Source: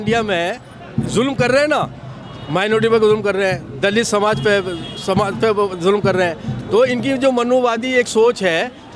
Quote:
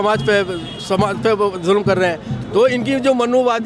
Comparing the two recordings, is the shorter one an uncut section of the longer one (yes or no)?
yes